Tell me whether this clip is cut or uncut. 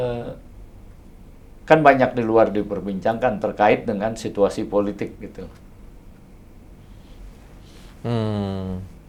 uncut